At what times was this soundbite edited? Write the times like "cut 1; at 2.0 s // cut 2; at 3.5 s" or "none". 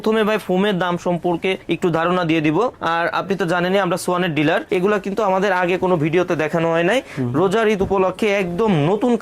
cut 1; at 4.7 s

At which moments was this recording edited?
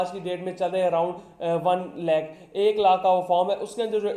none

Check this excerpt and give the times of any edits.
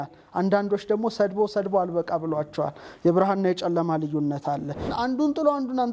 cut 1; at 4.9 s

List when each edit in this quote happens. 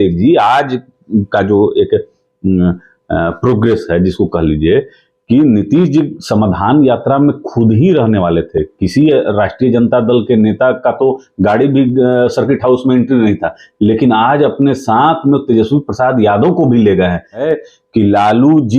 cut 1; at 17.4 s

